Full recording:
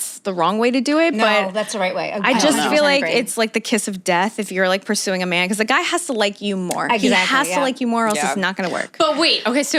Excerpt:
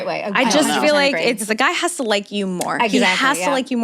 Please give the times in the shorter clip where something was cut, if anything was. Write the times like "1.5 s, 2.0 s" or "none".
1.4 s